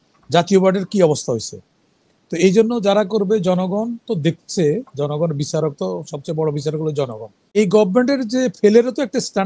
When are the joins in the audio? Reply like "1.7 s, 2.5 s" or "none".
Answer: 7.6 s